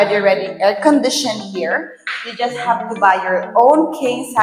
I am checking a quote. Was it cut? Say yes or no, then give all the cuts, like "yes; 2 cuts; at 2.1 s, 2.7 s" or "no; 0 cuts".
no; 0 cuts